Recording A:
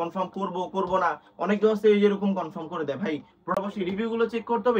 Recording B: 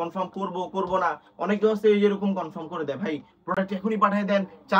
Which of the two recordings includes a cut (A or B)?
A